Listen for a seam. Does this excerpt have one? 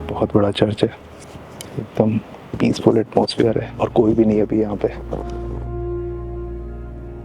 no; 0 cuts

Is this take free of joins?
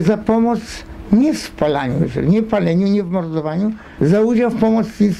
no; 1 cut; at 3.9 s

